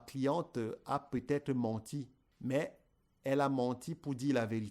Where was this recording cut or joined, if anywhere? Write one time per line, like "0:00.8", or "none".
0:02.2